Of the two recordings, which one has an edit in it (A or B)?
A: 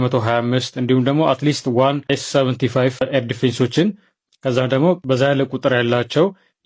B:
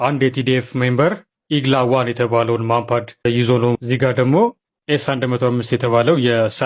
A